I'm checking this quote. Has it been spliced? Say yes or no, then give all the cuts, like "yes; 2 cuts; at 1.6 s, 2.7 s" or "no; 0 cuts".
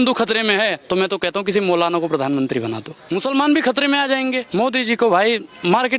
yes; 2 cuts; at 2.9 s, 4.4 s